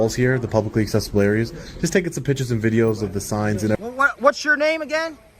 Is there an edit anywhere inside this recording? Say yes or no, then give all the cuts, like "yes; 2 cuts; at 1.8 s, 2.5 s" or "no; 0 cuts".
yes; 1 cut; at 3.8 s